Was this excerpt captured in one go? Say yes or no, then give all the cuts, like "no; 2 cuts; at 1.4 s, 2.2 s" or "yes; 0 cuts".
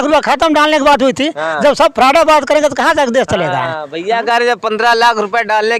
yes; 0 cuts